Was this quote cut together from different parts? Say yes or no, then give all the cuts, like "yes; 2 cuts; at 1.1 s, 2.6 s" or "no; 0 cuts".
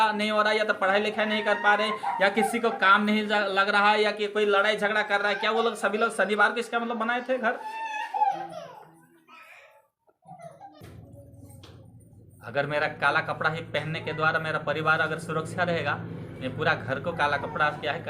yes; 1 cut; at 10.8 s